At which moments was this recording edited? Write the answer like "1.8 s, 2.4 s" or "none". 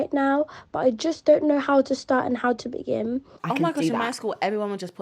3.4 s